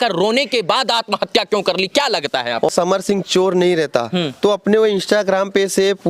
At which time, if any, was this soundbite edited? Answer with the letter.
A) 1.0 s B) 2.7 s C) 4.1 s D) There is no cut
B